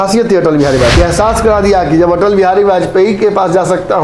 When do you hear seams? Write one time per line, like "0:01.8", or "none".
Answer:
0:01.0